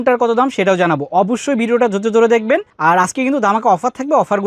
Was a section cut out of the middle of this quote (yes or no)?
no